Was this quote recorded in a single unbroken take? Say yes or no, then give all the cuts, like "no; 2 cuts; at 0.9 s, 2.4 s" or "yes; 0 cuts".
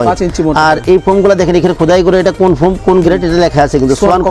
yes; 0 cuts